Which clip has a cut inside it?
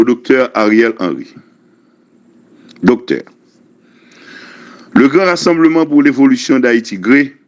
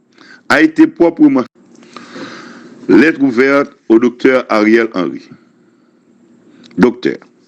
second; 1 cut; at 1.5 s

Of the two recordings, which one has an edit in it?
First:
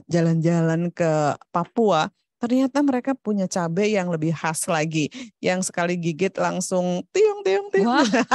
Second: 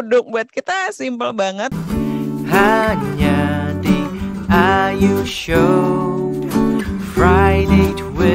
second; 1 cut; at 1.7 s

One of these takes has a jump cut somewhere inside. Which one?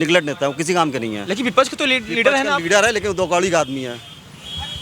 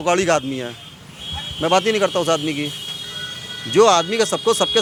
first; 1 cut; at 1.2 s

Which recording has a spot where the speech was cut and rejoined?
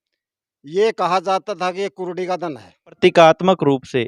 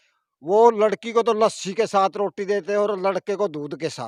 first; 1 cut; at 3.0 s

